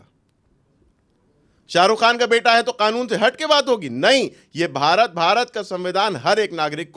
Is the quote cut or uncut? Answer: uncut